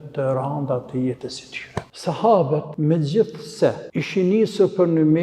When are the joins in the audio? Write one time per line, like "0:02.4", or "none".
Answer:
0:01.9
0:02.7
0:03.8